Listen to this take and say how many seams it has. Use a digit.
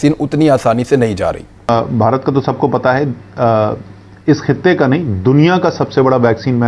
1